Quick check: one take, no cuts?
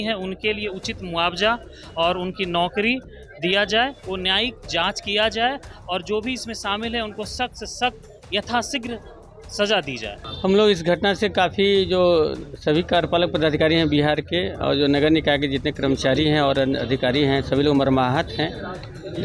no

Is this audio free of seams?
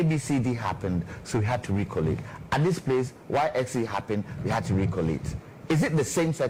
yes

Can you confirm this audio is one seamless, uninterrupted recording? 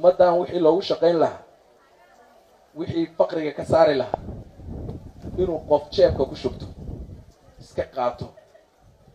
yes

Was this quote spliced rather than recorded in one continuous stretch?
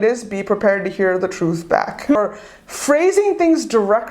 yes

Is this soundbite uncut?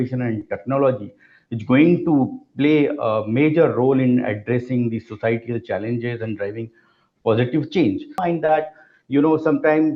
no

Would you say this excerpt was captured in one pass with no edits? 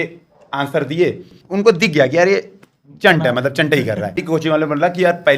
no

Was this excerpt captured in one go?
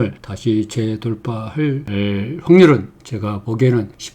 yes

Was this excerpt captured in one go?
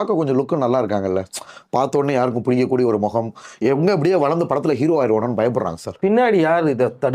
yes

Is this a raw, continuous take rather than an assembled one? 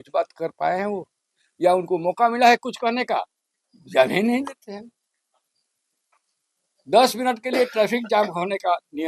yes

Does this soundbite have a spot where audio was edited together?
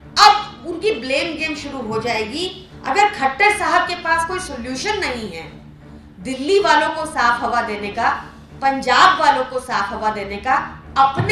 yes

